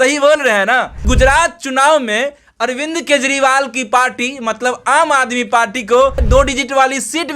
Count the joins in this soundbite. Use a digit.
2